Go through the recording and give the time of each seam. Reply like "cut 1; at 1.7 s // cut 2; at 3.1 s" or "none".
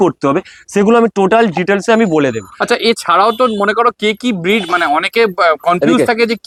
none